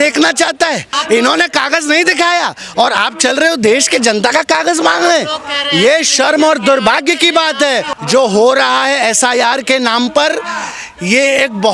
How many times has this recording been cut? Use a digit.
2